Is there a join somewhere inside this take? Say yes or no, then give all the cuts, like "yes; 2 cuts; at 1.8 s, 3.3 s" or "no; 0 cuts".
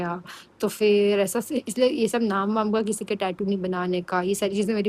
no; 0 cuts